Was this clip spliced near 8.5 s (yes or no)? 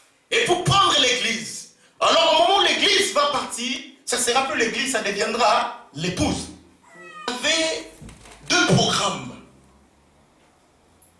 no